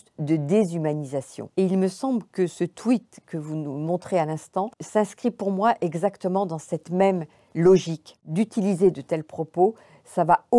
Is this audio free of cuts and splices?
no; 3 cuts; at 1.4 s, 4.8 s, 8.2 s

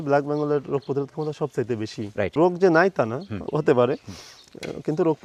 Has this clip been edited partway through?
no; 0 cuts

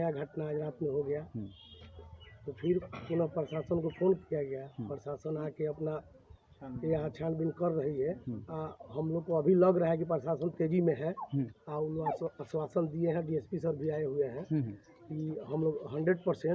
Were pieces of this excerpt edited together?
no; 0 cuts

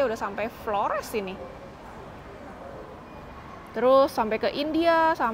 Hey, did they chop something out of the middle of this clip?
no; 0 cuts

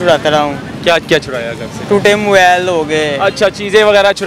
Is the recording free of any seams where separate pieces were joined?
no; 1 cut; at 1.7 s

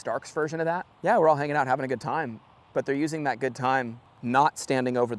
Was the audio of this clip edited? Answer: yes; 2 cuts; at 0.9 s, 4.0 s

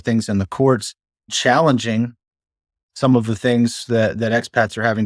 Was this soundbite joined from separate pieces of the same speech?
no; 0 cuts

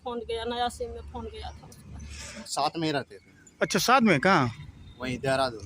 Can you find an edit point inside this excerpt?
yes; 1 cut; at 2.4 s

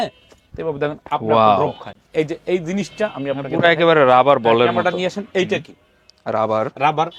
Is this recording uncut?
yes; 0 cuts

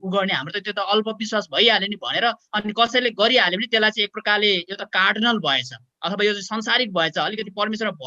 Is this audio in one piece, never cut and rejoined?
yes; 0 cuts

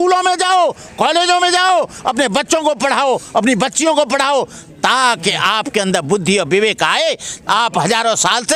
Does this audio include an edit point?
no; 0 cuts

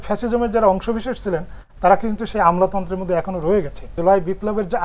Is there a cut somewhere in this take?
yes; 1 cut; at 3.8 s

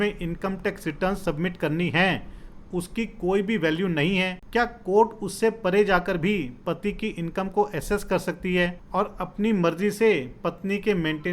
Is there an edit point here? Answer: yes; 2 cuts; at 4.4 s, 8.8 s

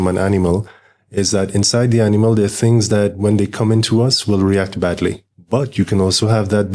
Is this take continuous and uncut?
no; 1 cut; at 5.3 s

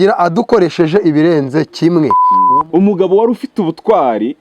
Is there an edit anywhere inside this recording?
yes; 1 cut; at 2.3 s

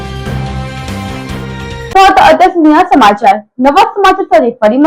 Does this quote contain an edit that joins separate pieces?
no; 0 cuts

